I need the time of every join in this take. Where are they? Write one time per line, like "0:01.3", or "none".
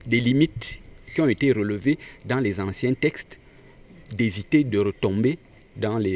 none